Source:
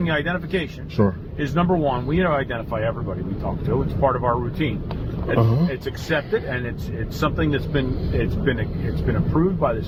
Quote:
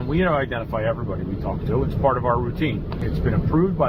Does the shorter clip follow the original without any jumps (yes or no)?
no